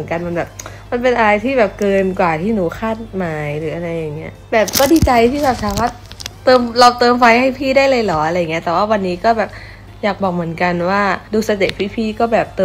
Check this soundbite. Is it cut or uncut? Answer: uncut